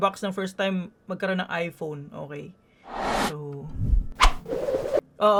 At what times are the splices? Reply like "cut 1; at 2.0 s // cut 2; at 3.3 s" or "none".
none